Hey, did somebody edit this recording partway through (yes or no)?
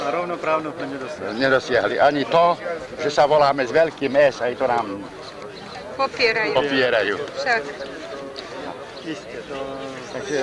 yes